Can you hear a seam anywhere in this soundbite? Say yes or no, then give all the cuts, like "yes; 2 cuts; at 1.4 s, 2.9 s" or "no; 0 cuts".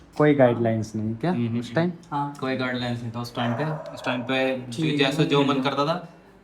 no; 0 cuts